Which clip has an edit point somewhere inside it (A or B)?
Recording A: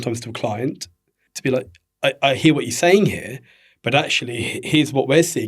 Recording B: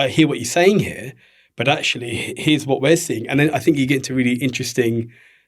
A